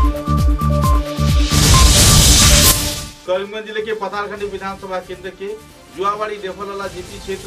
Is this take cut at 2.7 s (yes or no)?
yes